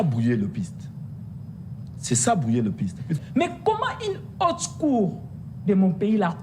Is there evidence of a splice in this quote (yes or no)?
yes